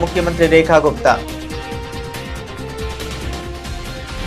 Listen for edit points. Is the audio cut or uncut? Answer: cut